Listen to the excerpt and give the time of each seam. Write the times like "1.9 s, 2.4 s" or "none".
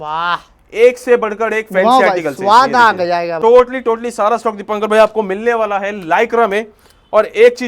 3.4 s